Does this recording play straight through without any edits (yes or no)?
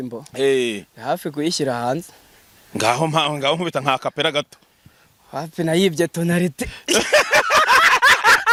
yes